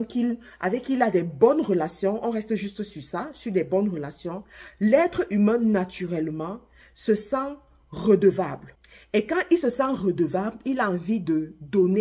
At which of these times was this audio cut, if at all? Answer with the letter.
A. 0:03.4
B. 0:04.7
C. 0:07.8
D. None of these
D